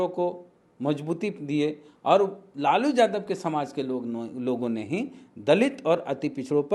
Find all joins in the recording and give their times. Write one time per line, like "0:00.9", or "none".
none